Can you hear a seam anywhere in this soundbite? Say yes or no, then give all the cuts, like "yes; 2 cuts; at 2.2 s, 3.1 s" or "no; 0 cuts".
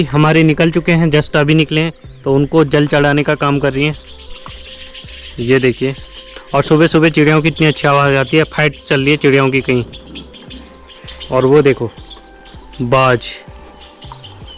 no; 0 cuts